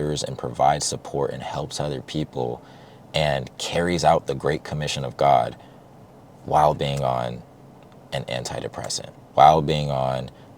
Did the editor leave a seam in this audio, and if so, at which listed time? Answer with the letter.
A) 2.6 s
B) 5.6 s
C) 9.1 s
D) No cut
C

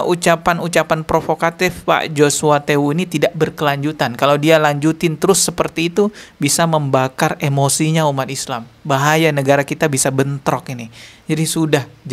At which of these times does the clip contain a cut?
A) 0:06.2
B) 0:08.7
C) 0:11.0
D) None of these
D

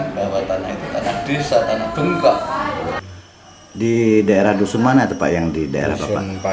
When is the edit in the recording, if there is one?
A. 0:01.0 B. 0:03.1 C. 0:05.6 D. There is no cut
B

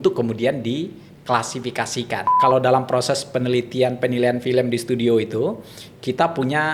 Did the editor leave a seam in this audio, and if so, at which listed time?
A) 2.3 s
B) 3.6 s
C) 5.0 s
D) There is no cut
A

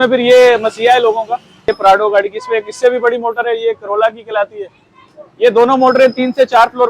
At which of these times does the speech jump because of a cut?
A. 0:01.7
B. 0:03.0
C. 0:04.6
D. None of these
A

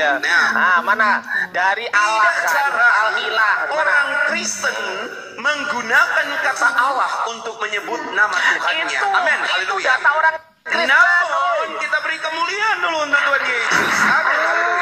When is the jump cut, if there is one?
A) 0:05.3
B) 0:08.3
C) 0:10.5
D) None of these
C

